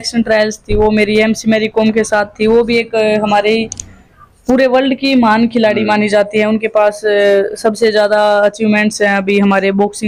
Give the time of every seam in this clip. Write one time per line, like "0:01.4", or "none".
none